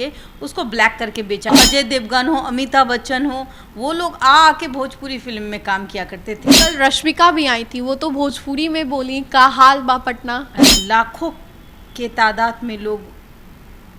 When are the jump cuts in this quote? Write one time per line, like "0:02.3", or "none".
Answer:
0:01.5
0:06.4
0:10.6